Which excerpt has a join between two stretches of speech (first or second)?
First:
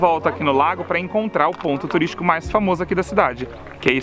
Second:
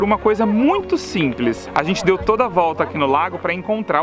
second